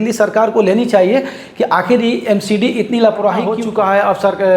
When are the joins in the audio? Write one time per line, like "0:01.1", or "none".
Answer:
0:03.6